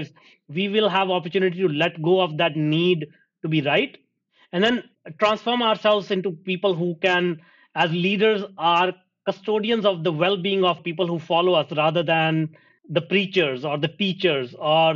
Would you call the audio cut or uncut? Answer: uncut